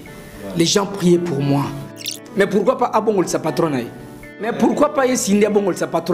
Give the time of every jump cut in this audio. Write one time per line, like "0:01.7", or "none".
0:02.1
0:04.5